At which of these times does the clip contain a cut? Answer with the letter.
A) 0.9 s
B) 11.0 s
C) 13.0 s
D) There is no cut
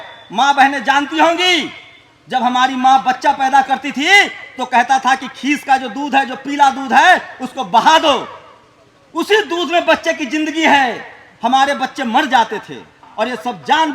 C